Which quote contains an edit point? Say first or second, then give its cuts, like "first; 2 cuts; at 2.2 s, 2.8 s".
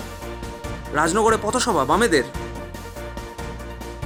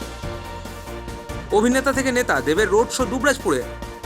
second; 1 cut; at 0.9 s